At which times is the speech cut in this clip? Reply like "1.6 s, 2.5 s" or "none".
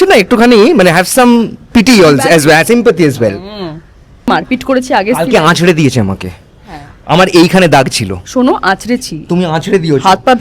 4.4 s